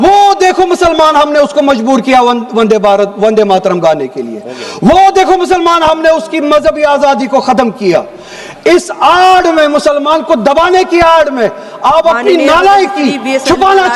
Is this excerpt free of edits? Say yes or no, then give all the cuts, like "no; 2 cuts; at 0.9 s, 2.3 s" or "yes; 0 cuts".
yes; 0 cuts